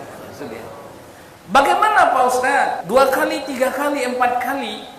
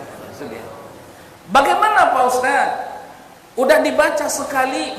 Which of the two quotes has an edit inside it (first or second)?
first